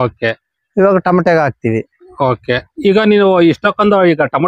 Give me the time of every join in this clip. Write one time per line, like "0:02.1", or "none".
none